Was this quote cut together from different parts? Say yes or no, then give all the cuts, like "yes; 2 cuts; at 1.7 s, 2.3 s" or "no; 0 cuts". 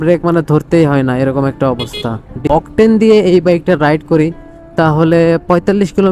yes; 1 cut; at 2.4 s